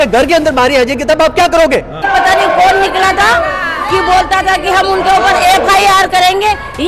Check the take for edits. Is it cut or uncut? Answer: cut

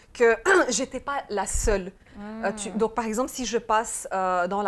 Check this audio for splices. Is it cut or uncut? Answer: uncut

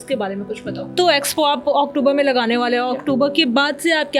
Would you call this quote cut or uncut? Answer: cut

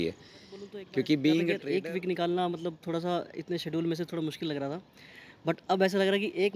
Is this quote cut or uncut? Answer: cut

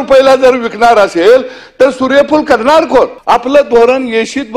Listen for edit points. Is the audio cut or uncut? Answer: cut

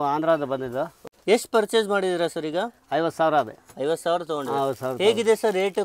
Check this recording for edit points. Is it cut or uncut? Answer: cut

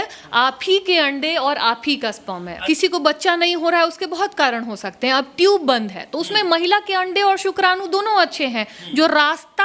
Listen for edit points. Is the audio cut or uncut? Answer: uncut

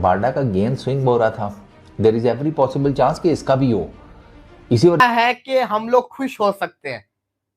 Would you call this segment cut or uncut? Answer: cut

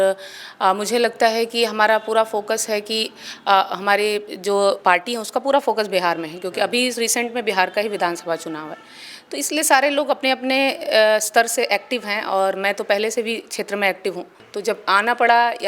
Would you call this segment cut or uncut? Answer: cut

